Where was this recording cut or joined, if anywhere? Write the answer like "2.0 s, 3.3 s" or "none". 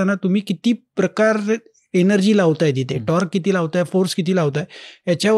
none